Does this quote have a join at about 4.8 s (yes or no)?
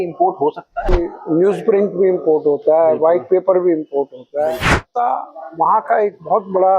yes